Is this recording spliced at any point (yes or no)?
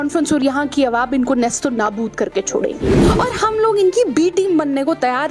yes